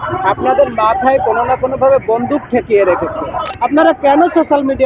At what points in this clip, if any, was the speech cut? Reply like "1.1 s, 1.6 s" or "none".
3.4 s